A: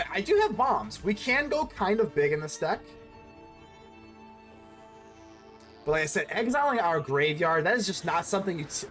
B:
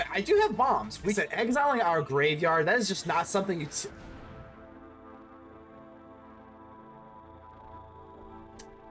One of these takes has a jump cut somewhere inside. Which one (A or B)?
B